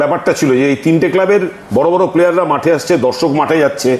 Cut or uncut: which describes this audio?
uncut